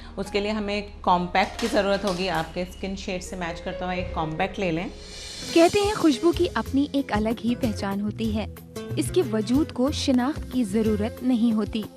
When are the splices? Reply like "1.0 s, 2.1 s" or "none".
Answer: 5.4 s